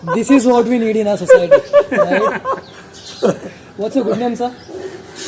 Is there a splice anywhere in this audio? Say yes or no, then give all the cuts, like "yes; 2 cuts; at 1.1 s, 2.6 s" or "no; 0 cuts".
no; 0 cuts